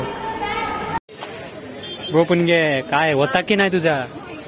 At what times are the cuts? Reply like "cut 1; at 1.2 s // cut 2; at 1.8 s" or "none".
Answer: cut 1; at 1.0 s

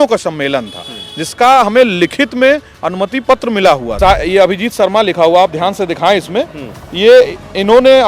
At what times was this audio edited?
cut 1; at 3.9 s

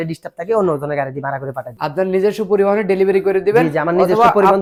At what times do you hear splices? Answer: none

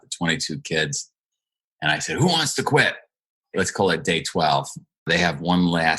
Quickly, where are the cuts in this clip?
cut 1; at 3.5 s // cut 2; at 5.1 s

